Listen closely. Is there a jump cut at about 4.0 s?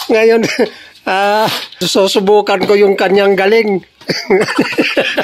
no; 1 cut; at 1.9 s

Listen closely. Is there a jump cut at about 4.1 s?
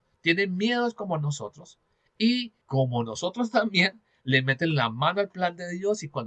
no; 1 cut; at 2.6 s

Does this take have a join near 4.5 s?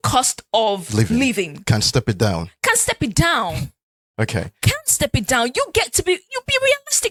no; 0 cuts

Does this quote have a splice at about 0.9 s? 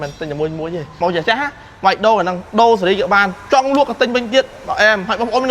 yes; 1 cut; at 0.9 s

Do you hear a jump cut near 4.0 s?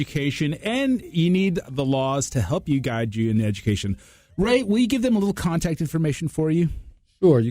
no; 0 cuts

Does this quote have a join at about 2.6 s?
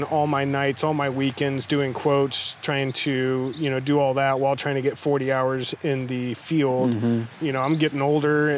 no; 1 cut; at 7.3 s

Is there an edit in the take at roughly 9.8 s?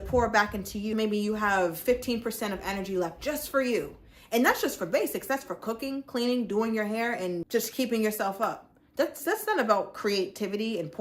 no; 2 cuts; at 0.9 s, 7.4 s

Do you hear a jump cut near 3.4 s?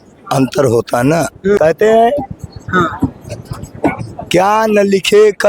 no; 1 cut; at 1.6 s

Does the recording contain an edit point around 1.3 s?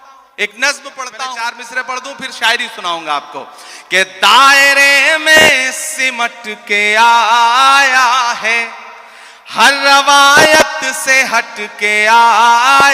yes; 1 cut; at 1.3 s

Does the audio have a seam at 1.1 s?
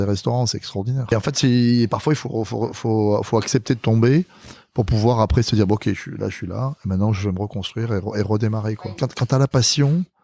yes; 2 cuts; at 1.1 s, 8.8 s

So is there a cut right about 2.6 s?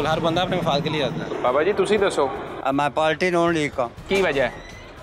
no; 2 cuts; at 1.3 s, 4.0 s

